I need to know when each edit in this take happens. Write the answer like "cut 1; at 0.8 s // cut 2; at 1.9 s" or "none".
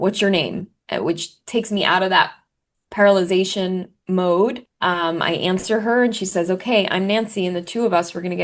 cut 1; at 4.7 s